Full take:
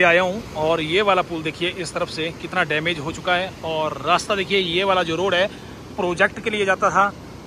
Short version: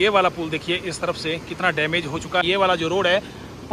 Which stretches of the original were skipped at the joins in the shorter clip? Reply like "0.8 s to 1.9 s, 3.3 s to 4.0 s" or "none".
3.4 s to 4.7 s